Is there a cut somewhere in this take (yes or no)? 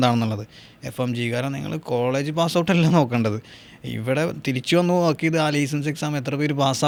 no